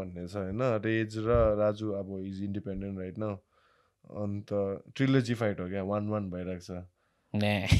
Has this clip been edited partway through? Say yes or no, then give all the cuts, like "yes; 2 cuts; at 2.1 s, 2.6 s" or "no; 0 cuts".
no; 0 cuts